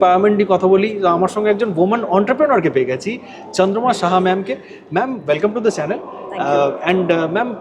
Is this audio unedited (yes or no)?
yes